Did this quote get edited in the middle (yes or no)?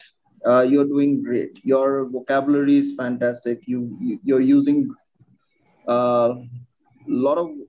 no